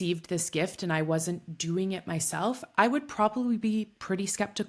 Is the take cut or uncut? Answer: uncut